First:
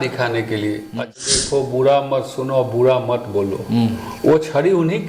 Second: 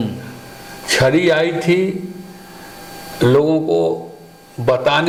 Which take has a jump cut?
first; 1 cut; at 1.1 s

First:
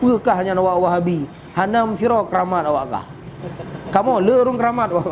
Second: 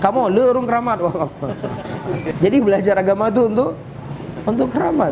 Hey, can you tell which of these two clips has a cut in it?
second; 1 cut; at 2.3 s

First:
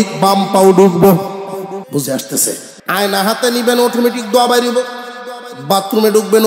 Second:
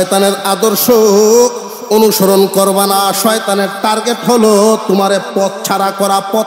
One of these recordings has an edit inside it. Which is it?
first; 2 cuts; at 1.9 s, 2.7 s

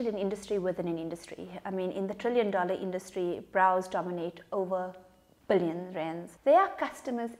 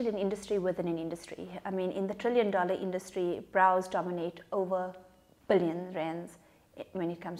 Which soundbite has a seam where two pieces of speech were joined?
first; 1 cut; at 6.3 s

